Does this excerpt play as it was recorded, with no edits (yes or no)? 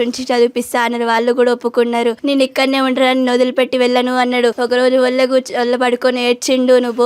no